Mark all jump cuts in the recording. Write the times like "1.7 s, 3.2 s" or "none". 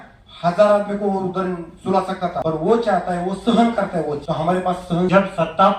2.4 s, 4.2 s, 5.1 s